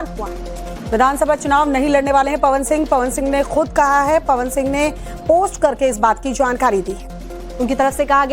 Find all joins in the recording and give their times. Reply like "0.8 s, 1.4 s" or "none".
none